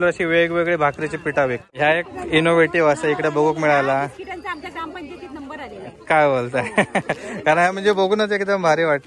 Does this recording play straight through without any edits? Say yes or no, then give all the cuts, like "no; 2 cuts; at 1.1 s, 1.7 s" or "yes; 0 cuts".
no; 1 cut; at 1.6 s